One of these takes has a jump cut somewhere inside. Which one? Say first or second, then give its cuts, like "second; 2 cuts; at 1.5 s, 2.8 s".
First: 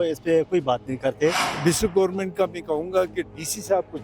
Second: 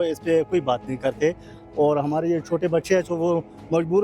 first; 1 cut; at 1.5 s